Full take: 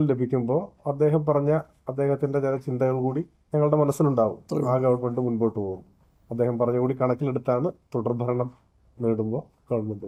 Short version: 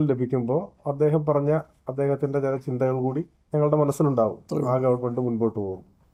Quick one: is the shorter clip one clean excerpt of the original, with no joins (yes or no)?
yes